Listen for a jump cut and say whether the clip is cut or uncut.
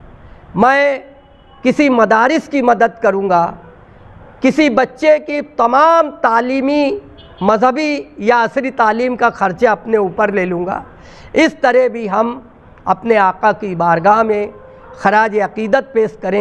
uncut